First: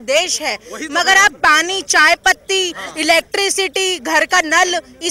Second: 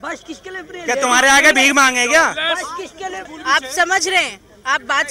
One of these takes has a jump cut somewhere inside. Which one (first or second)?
second